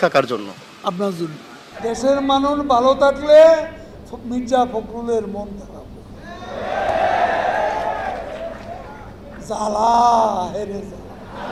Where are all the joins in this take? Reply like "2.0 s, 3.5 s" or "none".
none